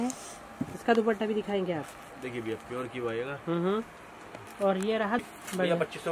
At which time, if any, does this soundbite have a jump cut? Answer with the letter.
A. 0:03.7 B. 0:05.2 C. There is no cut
B